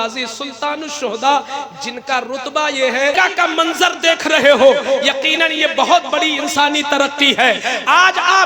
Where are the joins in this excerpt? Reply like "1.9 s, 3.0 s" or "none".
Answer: 3.1 s